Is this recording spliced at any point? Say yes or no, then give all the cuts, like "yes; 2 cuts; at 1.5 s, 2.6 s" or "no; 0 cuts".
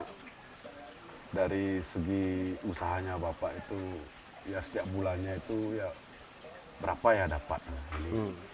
no; 0 cuts